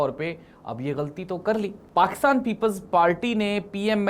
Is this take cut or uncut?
cut